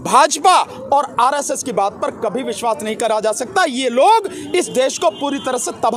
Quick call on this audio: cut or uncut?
uncut